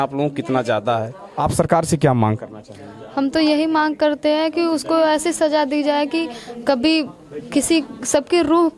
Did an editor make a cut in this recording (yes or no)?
yes